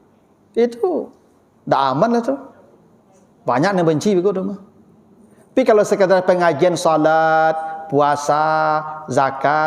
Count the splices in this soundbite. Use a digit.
0